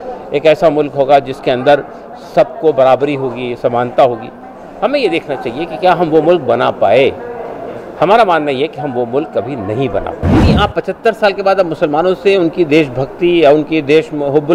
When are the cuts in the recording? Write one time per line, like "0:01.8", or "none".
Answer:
0:10.5